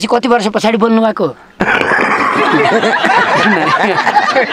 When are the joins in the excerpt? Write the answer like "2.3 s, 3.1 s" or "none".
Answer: 1.4 s